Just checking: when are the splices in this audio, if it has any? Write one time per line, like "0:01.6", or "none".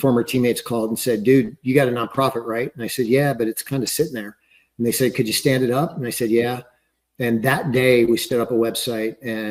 none